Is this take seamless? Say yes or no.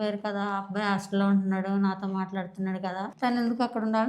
no